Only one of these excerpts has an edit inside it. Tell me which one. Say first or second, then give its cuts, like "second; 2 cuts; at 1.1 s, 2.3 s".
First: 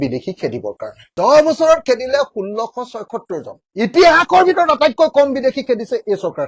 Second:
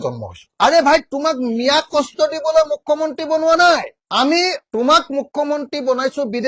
first; 2 cuts; at 1.1 s, 3.6 s